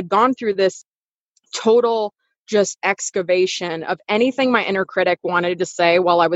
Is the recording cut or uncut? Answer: uncut